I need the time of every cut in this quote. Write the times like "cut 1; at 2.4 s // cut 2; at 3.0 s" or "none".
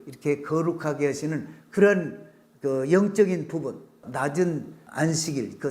cut 1; at 4.0 s // cut 2; at 4.8 s